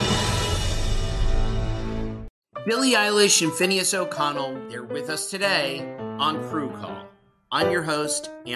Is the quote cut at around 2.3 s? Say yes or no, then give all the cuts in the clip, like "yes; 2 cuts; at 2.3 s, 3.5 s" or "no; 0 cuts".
yes; 1 cut; at 2.3 s